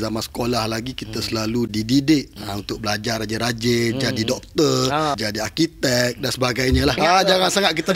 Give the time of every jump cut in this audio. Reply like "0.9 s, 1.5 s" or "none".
1.7 s, 5.2 s, 7.0 s